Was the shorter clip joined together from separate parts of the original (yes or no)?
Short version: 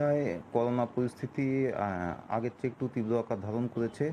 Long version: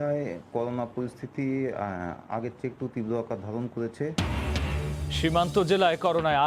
no